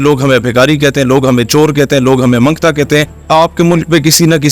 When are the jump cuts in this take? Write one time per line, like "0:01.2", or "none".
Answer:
0:03.2